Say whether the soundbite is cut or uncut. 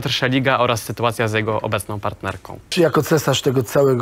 cut